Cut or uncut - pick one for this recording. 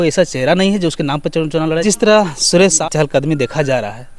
cut